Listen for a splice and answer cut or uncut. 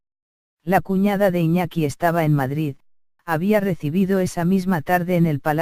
uncut